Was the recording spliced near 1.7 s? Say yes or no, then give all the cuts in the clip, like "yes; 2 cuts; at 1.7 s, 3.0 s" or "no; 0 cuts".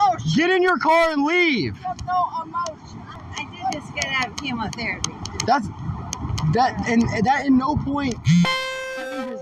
no; 1 cut; at 3.1 s